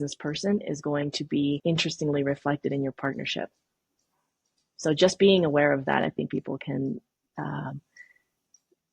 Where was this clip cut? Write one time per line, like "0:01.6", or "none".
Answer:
0:01.6